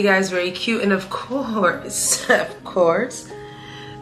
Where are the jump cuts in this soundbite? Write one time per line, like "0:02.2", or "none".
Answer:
none